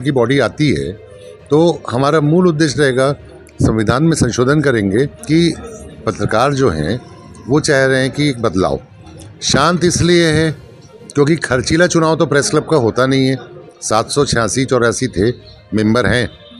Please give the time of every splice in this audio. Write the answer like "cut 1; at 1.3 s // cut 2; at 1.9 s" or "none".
cut 1; at 5.2 s